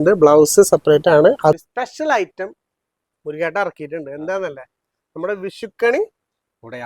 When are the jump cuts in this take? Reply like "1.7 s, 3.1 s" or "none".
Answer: 1.6 s